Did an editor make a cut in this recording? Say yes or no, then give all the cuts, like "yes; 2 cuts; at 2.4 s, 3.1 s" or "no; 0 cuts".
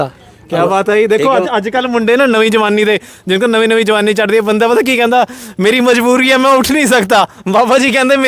no; 0 cuts